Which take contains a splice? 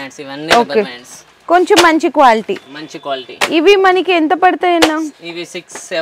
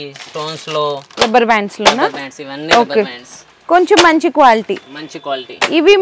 second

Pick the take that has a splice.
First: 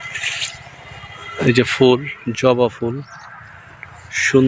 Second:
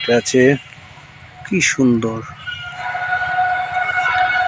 second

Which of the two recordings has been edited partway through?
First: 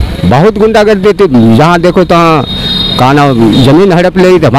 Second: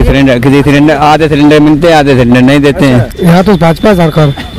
second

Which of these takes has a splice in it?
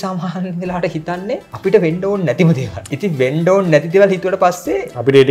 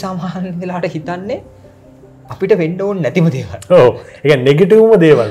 first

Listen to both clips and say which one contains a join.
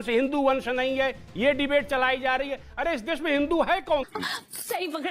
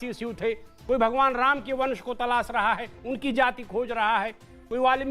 first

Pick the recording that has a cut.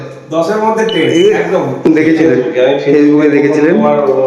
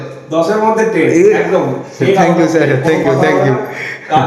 first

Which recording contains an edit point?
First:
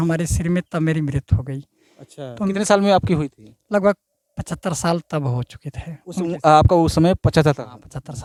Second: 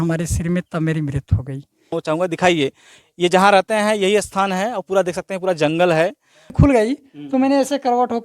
second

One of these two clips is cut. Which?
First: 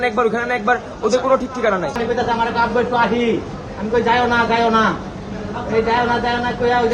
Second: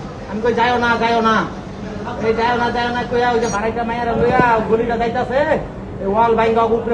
first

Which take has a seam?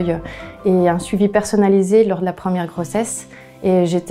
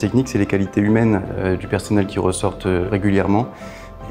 second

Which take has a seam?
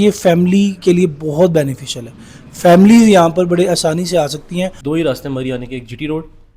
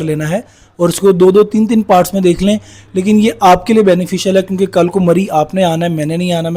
first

